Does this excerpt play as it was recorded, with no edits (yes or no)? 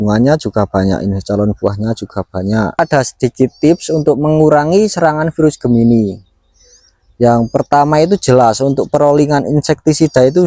no